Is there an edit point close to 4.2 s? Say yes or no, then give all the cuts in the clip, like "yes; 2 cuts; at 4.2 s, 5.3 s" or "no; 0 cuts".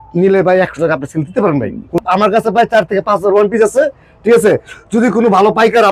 no; 1 cut; at 2.0 s